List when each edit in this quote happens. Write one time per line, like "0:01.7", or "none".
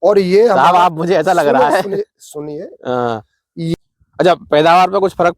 0:03.7